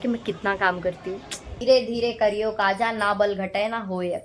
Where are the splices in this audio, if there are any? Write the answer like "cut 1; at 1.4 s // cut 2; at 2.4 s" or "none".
cut 1; at 1.6 s